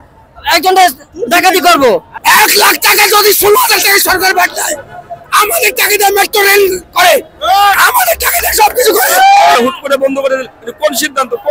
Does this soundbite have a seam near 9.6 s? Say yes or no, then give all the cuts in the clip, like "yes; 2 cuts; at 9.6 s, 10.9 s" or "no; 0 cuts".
yes; 2 cuts; at 2.1 s, 9.6 s